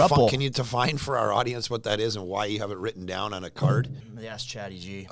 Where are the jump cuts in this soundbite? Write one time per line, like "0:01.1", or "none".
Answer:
0:04.0